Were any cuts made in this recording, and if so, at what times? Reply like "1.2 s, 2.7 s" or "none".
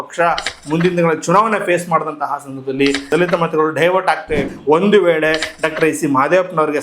3.1 s, 4.4 s